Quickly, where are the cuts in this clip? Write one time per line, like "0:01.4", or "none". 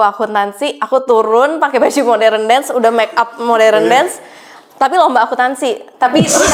none